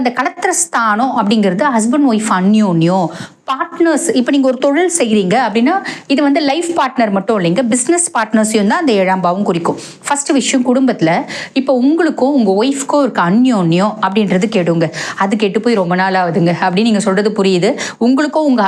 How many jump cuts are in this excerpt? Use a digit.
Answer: 0